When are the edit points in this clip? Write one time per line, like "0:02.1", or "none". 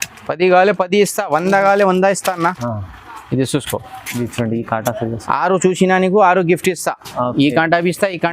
0:02.6